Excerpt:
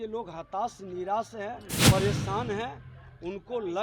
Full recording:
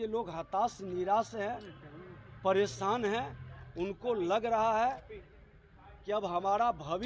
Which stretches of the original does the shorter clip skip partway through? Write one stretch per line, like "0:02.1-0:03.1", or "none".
0:01.7-0:02.3